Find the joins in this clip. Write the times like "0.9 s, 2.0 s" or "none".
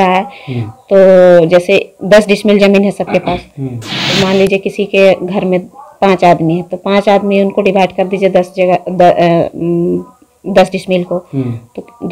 none